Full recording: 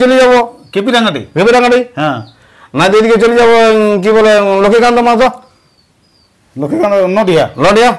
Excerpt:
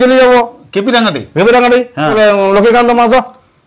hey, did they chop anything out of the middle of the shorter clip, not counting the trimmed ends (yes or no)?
yes